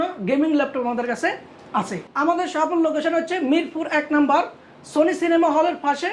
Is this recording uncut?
no; 1 cut; at 2.0 s

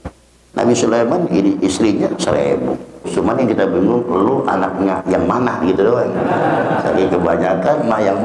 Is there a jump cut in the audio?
yes; 1 cut; at 3.1 s

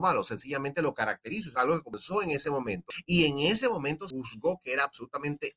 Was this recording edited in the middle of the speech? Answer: yes; 3 cuts; at 1.7 s, 2.9 s, 4.1 s

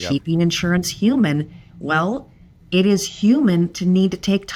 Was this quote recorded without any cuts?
yes; 0 cuts

